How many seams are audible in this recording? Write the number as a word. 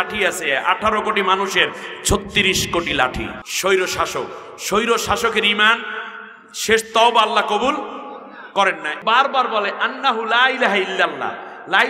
two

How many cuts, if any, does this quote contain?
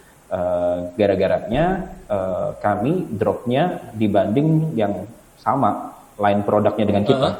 zero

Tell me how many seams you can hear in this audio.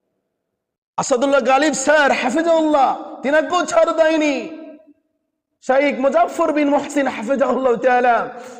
one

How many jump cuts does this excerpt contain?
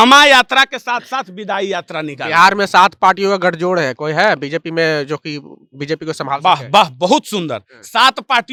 zero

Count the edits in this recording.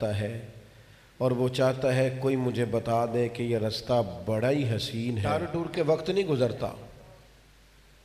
one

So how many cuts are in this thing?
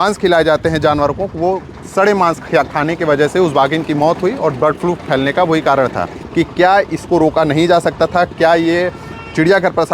one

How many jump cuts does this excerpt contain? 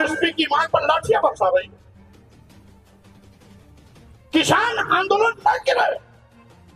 two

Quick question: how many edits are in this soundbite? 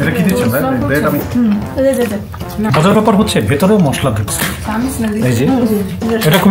one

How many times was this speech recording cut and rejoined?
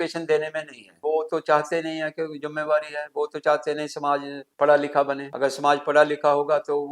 three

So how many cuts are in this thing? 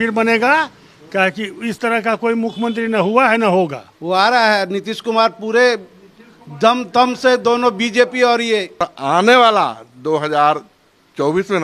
two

